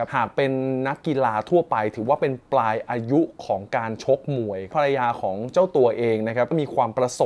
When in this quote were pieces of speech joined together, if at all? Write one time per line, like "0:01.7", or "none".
0:04.7
0:06.5